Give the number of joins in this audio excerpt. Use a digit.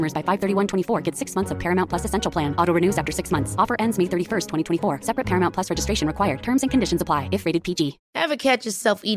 1